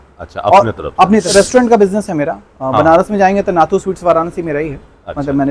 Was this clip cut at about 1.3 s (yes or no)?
yes